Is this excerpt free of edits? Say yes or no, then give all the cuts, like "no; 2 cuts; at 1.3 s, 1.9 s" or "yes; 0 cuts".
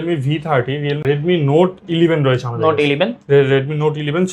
no; 1 cut; at 1.0 s